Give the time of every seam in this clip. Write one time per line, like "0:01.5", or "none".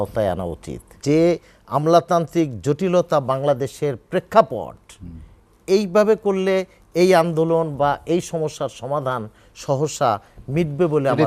0:01.0